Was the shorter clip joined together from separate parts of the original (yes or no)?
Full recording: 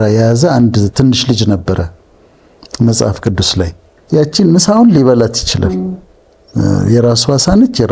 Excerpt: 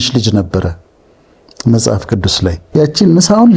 yes